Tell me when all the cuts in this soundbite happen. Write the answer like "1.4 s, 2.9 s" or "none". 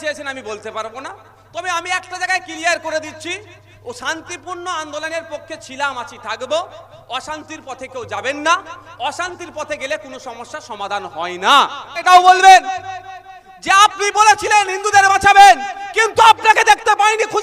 12.0 s